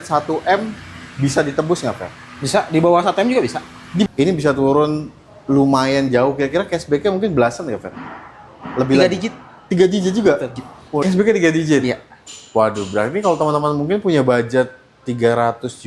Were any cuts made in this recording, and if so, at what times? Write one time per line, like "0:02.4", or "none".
0:04.1
0:11.0